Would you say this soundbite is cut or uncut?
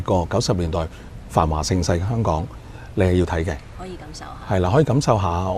uncut